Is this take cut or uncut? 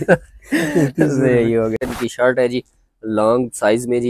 cut